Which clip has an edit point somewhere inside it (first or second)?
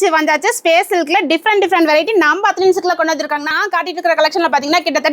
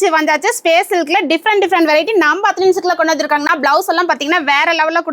first